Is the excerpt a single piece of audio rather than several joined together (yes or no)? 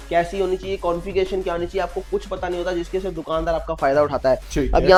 yes